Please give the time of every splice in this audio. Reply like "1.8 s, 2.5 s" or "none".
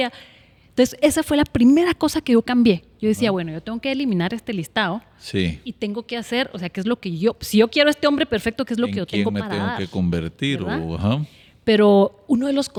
none